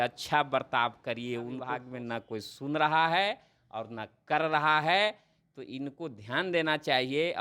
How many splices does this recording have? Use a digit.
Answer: 1